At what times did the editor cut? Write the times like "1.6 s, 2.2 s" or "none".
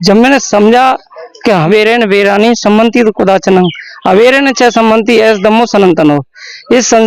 1.7 s